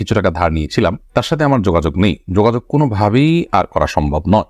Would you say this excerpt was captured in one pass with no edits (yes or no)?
yes